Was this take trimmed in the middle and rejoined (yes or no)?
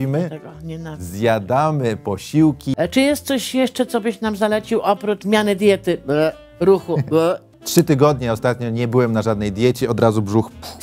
yes